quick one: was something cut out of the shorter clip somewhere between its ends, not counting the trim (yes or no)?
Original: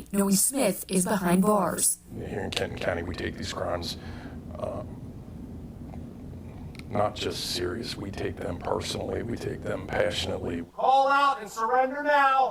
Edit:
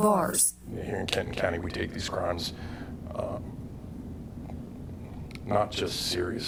no